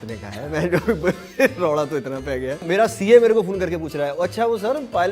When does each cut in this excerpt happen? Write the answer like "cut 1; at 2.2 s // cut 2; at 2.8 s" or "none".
cut 1; at 2.6 s